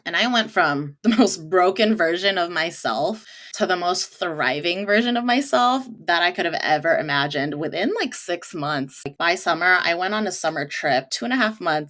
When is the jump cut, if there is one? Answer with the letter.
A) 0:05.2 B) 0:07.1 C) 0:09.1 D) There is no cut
C